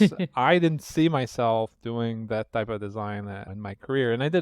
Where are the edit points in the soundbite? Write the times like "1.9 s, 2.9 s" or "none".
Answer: 3.5 s